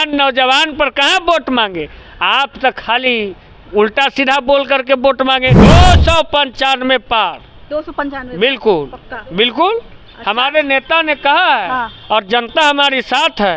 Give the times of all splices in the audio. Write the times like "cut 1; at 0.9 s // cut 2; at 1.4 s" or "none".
cut 1; at 5.6 s